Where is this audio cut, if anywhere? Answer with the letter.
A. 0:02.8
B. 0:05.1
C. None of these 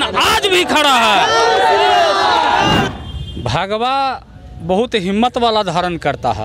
A